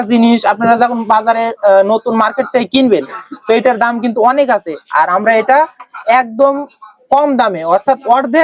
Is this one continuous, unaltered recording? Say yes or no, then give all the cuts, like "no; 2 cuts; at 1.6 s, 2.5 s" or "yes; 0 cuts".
yes; 0 cuts